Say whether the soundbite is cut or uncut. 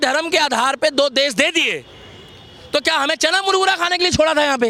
uncut